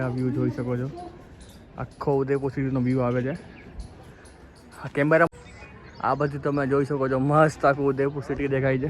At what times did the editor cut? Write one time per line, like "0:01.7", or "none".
0:05.3